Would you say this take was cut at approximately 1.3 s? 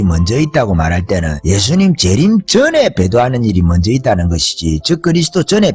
yes; 1 cut; at 1.3 s

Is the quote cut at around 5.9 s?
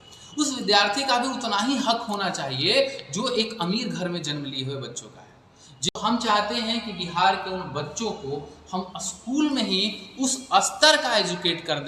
yes; 1 cut; at 5.9 s

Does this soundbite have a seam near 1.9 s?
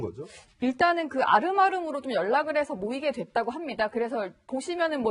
yes; 1 cut; at 1.9 s

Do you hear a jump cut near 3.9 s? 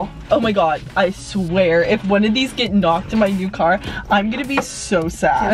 no; 0 cuts

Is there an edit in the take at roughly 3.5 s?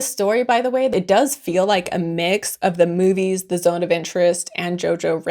no; 1 cut; at 0.9 s

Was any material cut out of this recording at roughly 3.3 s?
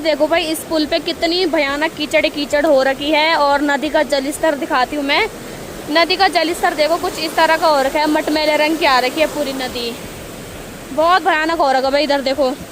no; 0 cuts

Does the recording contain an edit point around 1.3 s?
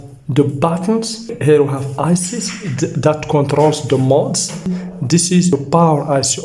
yes; 2 cuts; at 1.3 s, 4.7 s

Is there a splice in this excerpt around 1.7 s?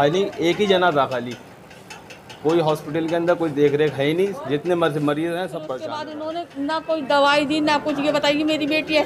no; 1 cut; at 5.8 s

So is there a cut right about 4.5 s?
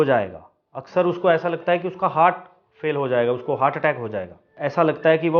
yes; 1 cut; at 4.5 s

